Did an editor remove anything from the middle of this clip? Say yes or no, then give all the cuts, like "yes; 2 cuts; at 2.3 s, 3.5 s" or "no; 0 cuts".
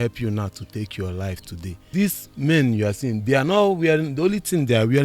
yes; 1 cut; at 1.9 s